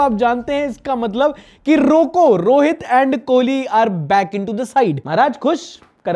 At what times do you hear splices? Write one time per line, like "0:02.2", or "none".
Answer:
0:05.0